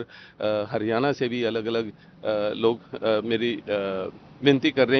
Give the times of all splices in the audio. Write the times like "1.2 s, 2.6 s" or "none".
none